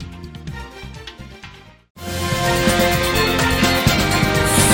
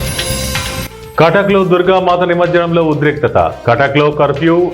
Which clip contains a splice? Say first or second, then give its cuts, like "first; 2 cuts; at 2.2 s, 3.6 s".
second; 1 cut; at 0.9 s